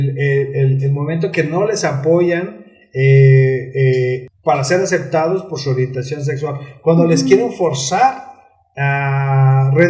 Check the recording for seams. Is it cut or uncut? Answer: cut